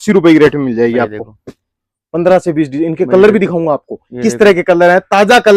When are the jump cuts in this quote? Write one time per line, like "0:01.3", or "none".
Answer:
none

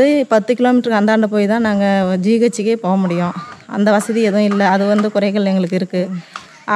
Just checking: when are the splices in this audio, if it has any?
none

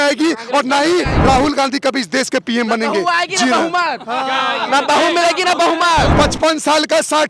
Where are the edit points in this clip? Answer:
0:01.1
0:06.1

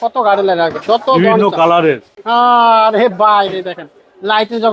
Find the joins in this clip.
0:02.1

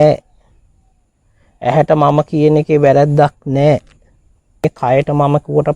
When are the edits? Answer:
0:04.6

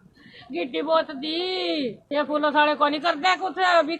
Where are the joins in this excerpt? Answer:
0:02.0

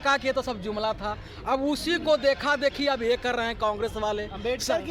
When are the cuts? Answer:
none

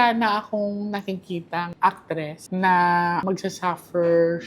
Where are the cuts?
0:02.4

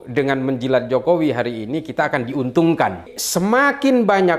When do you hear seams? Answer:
0:03.2

